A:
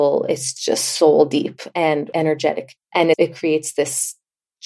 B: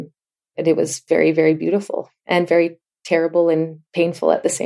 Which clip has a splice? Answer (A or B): A